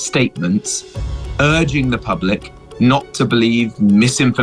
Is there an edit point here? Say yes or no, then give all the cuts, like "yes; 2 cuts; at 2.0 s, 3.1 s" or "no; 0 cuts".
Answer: no; 0 cuts